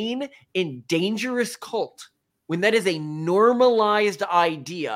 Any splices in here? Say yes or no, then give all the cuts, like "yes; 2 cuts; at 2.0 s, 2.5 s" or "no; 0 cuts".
no; 0 cuts